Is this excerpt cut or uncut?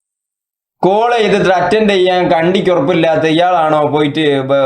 uncut